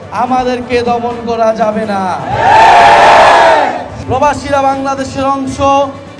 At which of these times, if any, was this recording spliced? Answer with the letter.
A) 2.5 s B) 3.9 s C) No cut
B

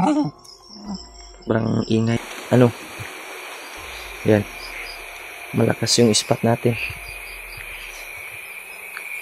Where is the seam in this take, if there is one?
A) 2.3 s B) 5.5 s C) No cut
A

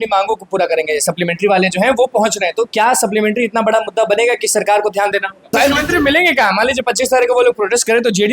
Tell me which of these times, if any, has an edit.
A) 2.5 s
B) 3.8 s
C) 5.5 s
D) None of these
C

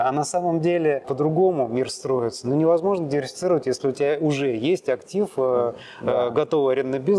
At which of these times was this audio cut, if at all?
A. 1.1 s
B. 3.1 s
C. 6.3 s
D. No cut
A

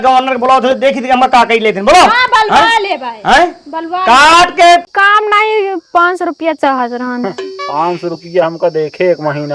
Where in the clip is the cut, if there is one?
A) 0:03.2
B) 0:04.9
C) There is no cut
B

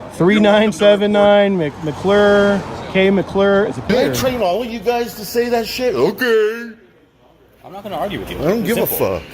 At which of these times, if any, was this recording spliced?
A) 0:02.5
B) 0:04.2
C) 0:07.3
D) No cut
B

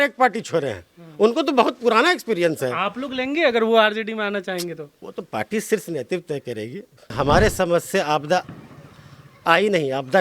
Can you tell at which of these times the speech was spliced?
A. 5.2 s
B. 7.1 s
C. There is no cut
B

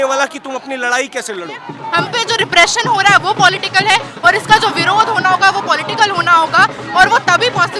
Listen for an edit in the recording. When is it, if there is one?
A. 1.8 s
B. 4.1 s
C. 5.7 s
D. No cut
A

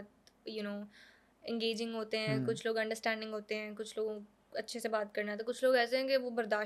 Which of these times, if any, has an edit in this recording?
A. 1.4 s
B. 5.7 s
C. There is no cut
C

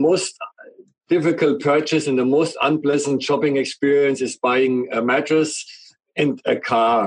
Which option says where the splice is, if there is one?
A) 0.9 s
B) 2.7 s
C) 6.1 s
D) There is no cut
D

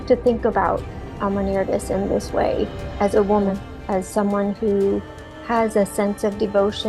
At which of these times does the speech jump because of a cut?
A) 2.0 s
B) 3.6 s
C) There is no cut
B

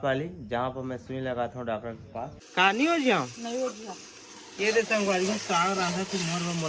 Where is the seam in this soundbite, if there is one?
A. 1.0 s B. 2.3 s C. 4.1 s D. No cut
B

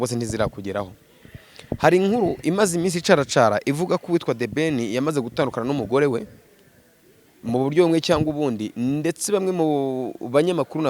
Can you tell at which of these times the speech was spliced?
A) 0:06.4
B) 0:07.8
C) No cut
C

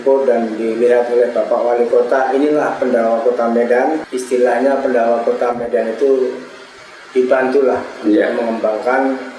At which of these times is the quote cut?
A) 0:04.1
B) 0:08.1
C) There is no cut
A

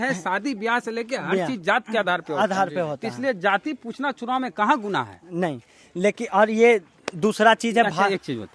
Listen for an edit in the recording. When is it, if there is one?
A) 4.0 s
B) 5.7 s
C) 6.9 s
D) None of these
D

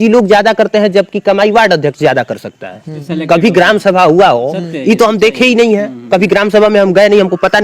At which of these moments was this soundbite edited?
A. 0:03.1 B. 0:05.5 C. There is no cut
A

